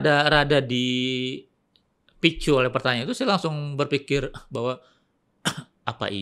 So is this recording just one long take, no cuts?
yes; 0 cuts

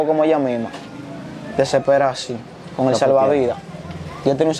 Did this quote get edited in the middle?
no; 0 cuts

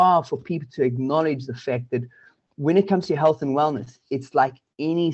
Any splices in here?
no; 0 cuts

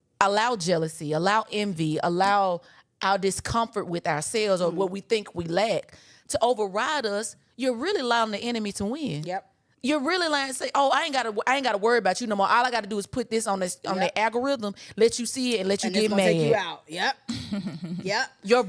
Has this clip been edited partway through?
no; 0 cuts

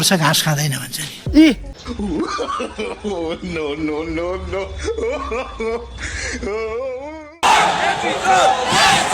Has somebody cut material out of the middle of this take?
yes; 2 cuts; at 1.7 s, 7.4 s

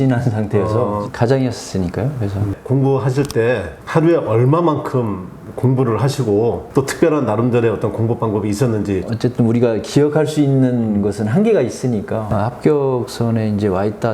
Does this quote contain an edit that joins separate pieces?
yes; 3 cuts; at 1.0 s, 2.5 s, 12.3 s

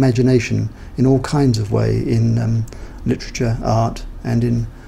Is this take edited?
no; 0 cuts

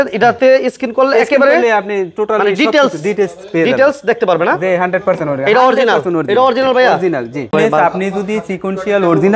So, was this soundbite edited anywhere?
yes; 1 cut; at 7.5 s

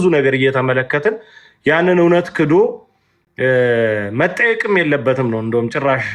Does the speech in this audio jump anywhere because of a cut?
no; 0 cuts

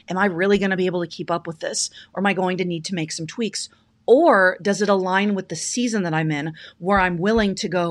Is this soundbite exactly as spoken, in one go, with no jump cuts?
yes; 0 cuts

